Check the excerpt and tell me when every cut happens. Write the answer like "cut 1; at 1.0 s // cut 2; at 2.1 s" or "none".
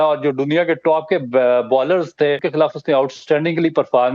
cut 1; at 2.4 s